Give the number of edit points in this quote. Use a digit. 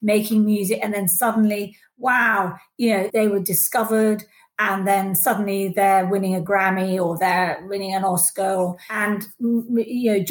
2